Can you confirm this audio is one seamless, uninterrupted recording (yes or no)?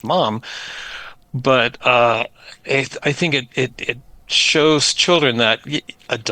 yes